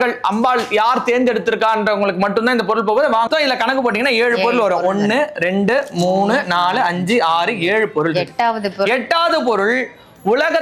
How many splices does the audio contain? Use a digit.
1